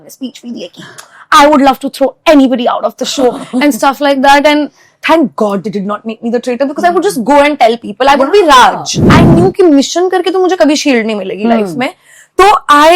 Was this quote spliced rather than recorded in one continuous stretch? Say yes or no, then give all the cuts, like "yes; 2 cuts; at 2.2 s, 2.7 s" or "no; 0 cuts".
yes; 1 cut; at 8.9 s